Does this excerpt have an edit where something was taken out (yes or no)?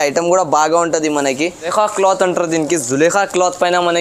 yes